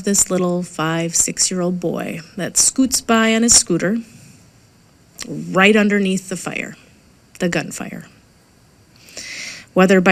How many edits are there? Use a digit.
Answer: 0